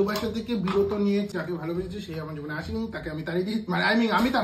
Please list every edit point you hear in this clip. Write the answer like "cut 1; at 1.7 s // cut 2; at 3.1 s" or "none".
cut 1; at 1.3 s